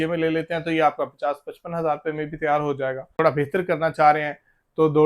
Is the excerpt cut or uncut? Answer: cut